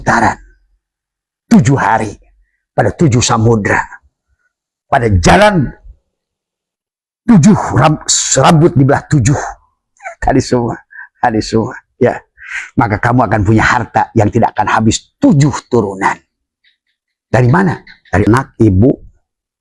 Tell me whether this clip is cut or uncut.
cut